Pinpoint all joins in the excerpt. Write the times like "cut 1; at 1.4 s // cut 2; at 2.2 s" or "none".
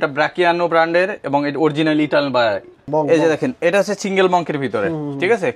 cut 1; at 2.8 s